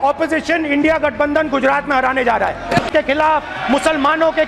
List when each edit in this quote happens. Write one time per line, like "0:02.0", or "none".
0:02.9